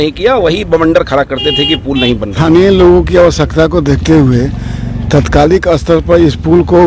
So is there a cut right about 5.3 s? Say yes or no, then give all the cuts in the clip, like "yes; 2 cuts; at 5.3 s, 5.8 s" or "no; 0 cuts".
no; 1 cut; at 2.3 s